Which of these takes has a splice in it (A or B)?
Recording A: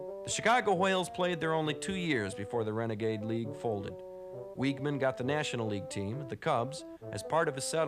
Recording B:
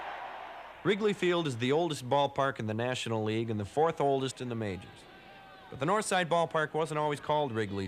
A